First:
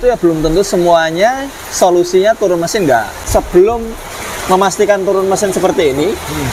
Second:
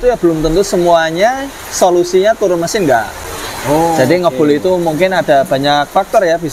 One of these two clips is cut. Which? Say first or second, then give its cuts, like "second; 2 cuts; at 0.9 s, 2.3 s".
first; 1 cut; at 3.2 s